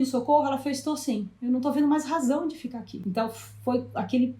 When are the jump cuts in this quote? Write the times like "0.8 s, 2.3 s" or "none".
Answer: 2.9 s